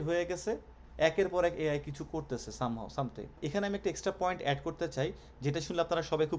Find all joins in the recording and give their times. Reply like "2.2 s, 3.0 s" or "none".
3.4 s